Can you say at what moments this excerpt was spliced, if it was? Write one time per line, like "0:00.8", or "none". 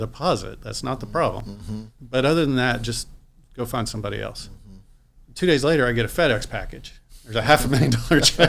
0:02.0